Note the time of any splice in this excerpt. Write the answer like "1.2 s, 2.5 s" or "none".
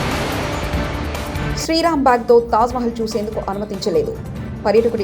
1.1 s